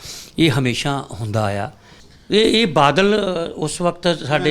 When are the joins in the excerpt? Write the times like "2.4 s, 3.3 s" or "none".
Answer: 1.8 s